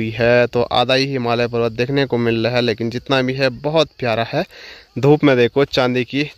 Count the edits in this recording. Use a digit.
0